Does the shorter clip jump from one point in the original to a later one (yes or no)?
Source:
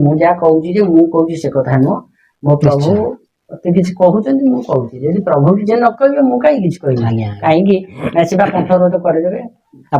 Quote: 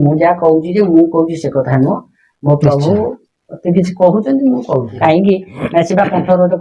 yes